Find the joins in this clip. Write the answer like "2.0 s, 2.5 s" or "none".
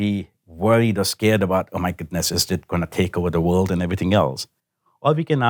none